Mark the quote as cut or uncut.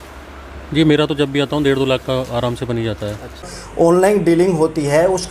cut